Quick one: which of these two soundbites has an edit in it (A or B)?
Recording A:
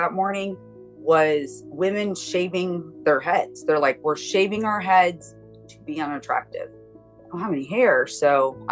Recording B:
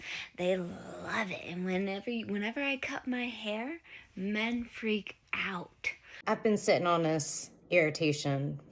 B